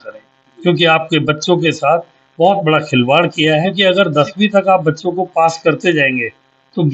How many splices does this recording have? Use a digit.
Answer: 1